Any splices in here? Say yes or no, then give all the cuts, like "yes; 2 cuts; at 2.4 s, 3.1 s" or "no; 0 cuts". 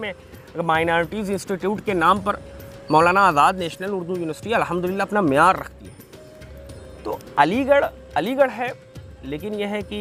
no; 0 cuts